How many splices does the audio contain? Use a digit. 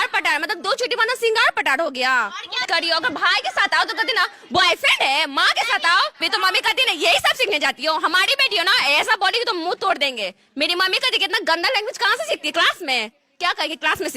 2